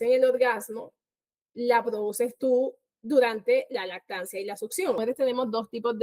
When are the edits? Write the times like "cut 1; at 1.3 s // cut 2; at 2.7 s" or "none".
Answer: cut 1; at 5.0 s